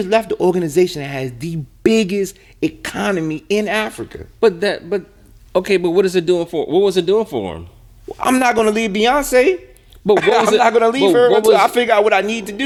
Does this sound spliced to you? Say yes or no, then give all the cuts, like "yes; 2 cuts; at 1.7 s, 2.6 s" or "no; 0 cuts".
no; 0 cuts